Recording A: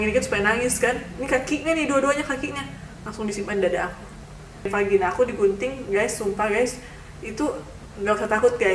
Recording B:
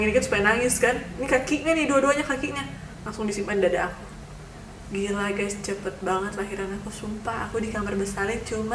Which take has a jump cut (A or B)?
A